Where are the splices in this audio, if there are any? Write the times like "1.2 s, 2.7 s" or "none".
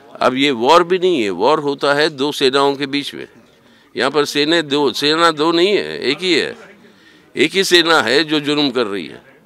none